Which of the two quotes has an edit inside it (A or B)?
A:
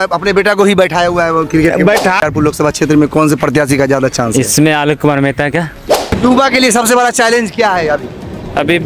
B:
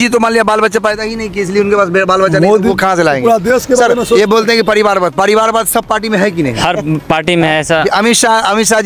A